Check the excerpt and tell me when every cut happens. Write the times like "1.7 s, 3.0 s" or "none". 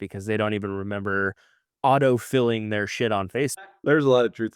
3.7 s